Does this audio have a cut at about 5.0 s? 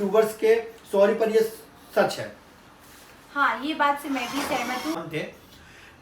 yes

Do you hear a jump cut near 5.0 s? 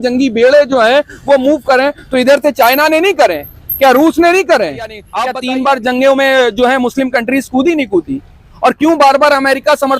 yes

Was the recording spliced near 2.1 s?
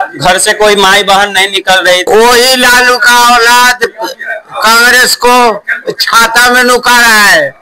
yes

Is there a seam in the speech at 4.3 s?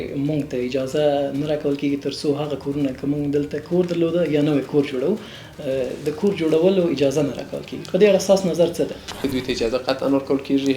no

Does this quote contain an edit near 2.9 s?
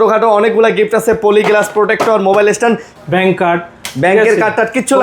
yes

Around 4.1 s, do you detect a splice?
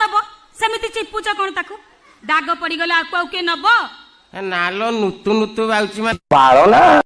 no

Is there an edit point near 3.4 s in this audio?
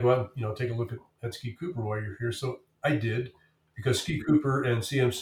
no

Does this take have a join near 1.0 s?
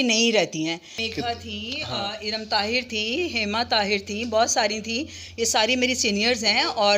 yes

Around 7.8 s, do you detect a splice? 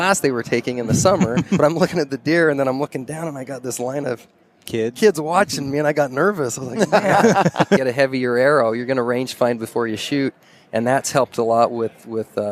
yes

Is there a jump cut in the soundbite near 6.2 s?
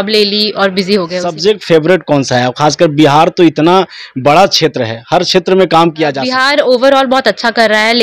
yes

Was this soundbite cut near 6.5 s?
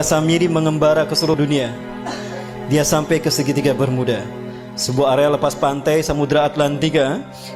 no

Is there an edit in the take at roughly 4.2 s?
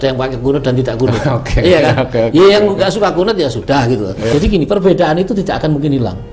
yes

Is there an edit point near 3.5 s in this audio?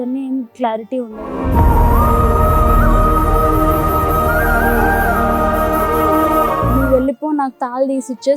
no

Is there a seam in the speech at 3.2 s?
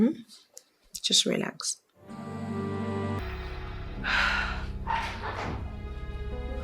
yes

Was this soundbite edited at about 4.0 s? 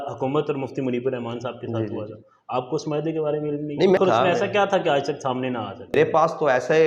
yes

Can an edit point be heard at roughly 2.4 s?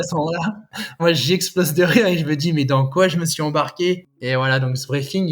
no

